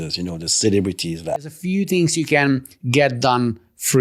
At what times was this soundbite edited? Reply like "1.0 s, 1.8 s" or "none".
1.6 s

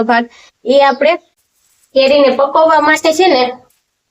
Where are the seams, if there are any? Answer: 1.3 s

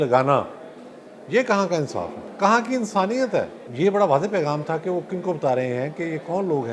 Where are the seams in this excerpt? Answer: 2.2 s, 3.6 s

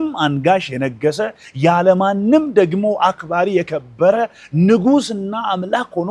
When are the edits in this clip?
none

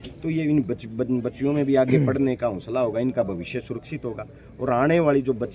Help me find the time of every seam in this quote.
none

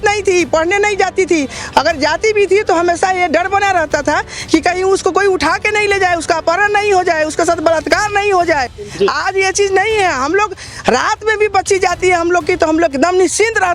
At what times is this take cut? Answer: none

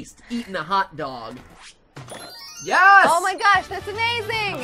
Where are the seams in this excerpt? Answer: 1.4 s

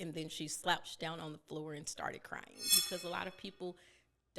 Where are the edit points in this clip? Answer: 2.8 s

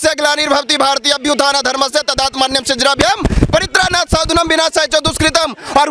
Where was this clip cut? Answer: none

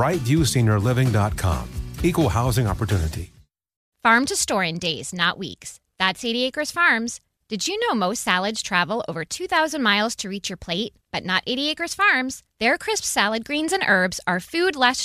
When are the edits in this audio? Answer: 3.8 s

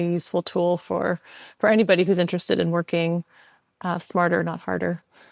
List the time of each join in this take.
none

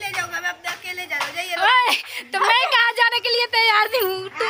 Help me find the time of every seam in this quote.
none

